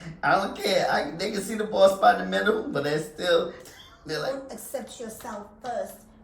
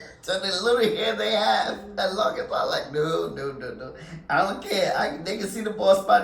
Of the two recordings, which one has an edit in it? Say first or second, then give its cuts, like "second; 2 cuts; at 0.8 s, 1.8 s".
first; 1 cut; at 4.2 s